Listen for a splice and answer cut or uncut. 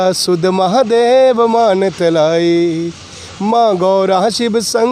uncut